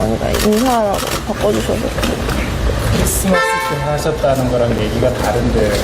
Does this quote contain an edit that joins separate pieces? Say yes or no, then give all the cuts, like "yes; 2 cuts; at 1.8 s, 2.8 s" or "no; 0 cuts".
yes; 1 cut; at 1.1 s